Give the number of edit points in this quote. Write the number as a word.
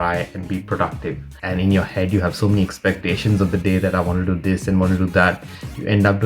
one